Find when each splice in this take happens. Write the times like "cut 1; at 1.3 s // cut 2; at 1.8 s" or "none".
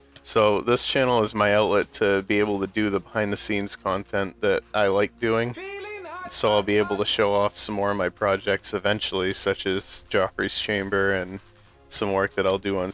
cut 1; at 4.4 s

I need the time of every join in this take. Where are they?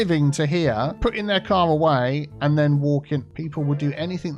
cut 1; at 0.9 s // cut 2; at 3.4 s

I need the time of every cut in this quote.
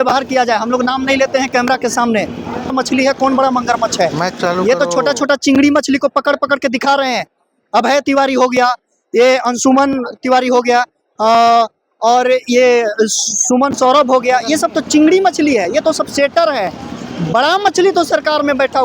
cut 1; at 2.7 s

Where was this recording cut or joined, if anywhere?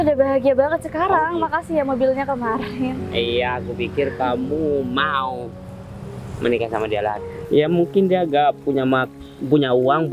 cut 1; at 7.3 s

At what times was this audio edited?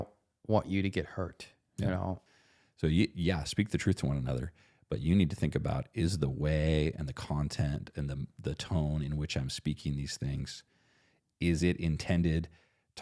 cut 1; at 2.2 s

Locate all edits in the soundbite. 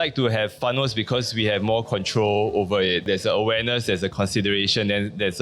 cut 1; at 3.1 s

